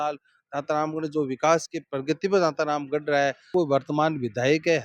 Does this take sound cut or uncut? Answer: cut